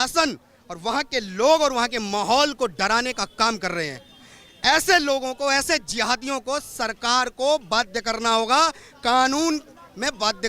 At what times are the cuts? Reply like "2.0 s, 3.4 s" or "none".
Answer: none